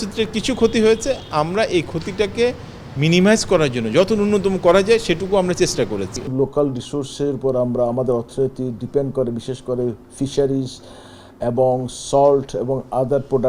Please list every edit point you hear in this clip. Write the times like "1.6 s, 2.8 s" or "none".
6.3 s